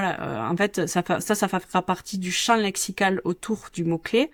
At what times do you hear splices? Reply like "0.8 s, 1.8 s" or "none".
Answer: none